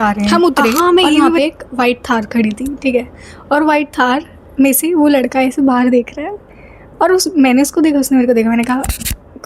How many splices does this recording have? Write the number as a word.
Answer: one